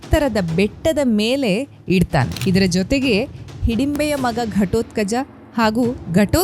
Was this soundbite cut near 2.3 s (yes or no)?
yes